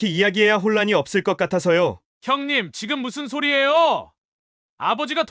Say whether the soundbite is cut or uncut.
cut